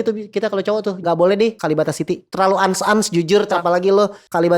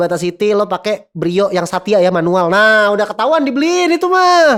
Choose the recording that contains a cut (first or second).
first